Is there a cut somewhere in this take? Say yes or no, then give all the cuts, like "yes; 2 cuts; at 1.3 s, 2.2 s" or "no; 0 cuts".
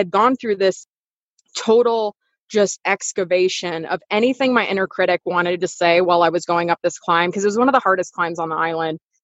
no; 0 cuts